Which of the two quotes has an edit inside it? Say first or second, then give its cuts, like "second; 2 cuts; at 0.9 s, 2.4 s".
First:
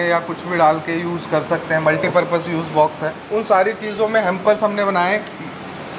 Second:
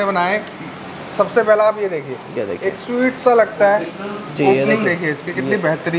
first; 1 cut; at 3.1 s